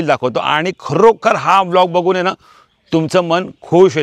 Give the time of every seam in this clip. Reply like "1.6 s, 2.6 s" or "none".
none